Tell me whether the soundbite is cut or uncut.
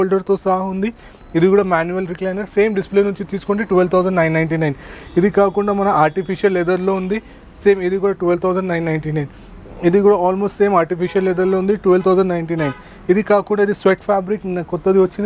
uncut